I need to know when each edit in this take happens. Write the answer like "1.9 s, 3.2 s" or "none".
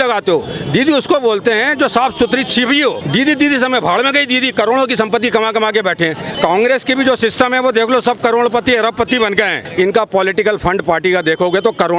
3.0 s, 6.3 s, 9.6 s